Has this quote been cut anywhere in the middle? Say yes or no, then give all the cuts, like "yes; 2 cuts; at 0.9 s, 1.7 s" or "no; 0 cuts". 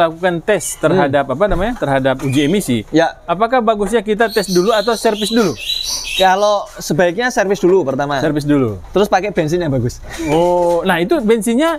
no; 0 cuts